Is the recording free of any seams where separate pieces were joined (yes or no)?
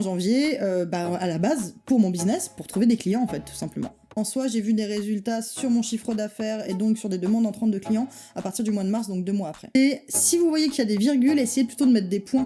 no